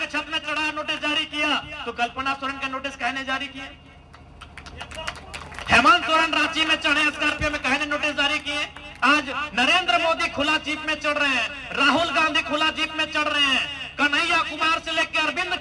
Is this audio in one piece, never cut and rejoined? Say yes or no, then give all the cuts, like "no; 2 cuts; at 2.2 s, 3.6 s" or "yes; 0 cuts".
yes; 0 cuts